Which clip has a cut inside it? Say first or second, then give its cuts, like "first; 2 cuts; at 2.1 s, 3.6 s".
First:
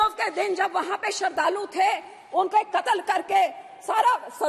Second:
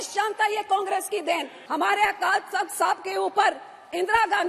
second; 1 cut; at 1.6 s